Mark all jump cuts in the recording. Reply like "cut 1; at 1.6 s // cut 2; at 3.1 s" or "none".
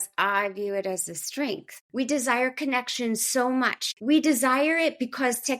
cut 1; at 1.8 s // cut 2; at 3.9 s